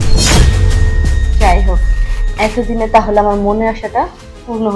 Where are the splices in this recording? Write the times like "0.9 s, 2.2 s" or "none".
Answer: none